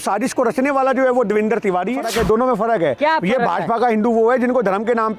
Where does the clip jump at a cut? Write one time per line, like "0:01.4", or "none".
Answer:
0:02.0